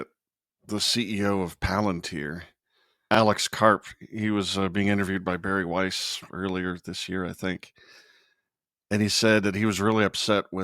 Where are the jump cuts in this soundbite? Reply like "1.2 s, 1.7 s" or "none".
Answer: 3.1 s